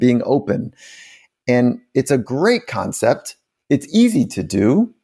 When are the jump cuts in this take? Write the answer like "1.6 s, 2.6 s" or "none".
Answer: none